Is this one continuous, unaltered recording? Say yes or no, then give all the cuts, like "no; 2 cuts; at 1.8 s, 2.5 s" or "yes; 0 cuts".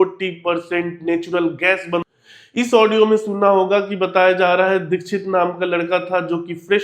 no; 1 cut; at 2.0 s